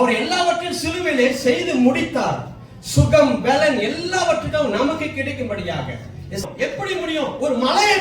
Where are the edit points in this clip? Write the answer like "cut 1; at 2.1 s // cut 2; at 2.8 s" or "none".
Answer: cut 1; at 6.4 s

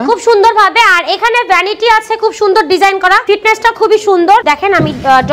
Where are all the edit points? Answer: cut 1; at 3.2 s // cut 2; at 4.4 s

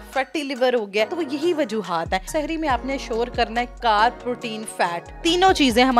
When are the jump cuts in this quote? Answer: cut 1; at 1.1 s // cut 2; at 2.3 s // cut 3; at 5.1 s

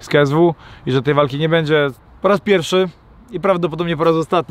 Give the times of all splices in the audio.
cut 1; at 2.1 s

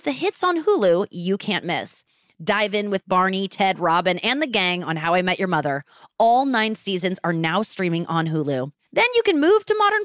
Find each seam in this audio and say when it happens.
none

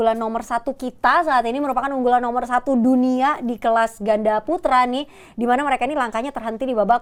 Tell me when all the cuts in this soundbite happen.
none

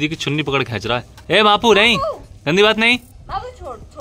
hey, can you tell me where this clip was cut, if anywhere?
none

